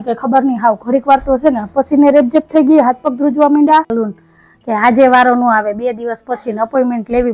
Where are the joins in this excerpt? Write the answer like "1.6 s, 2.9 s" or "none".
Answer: 3.9 s